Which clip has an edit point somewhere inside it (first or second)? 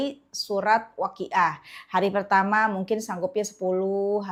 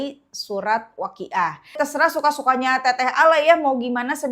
second